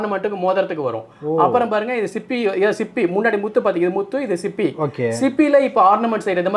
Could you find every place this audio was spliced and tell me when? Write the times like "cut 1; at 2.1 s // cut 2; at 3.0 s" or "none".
none